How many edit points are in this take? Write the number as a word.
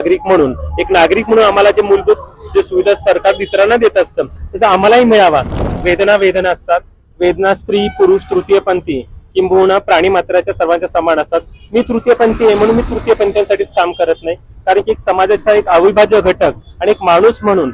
one